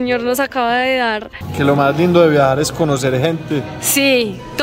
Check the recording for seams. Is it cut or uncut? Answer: cut